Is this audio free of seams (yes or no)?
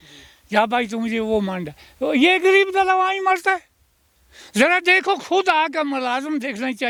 yes